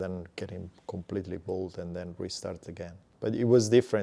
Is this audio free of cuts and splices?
no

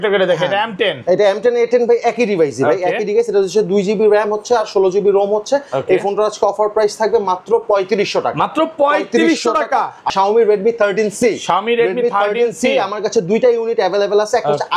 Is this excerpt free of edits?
no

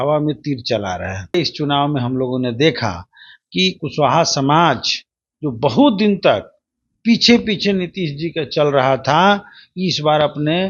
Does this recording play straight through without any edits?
no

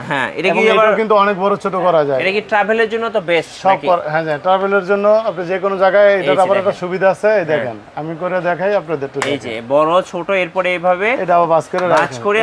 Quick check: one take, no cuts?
yes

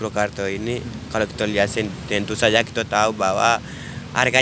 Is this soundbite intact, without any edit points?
yes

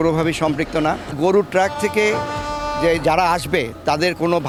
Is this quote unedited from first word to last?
yes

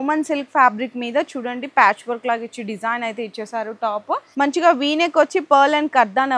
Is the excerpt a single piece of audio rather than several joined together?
no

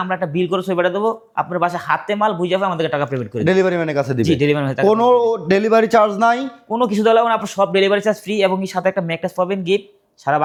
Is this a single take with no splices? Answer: yes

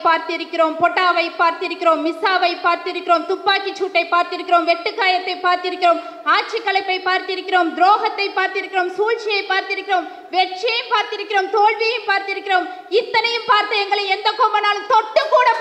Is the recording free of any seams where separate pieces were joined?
yes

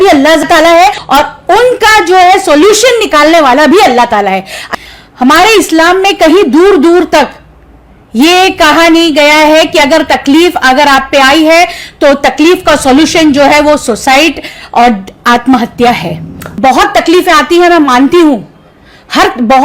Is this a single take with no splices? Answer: no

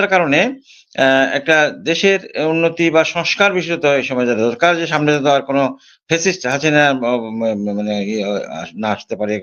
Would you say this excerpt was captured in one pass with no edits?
yes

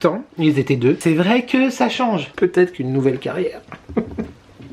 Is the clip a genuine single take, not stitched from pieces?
no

